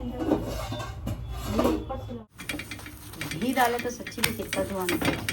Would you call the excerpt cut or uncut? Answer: cut